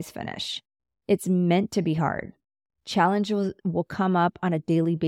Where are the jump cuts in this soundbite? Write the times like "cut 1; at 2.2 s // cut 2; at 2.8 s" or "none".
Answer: cut 1; at 3.6 s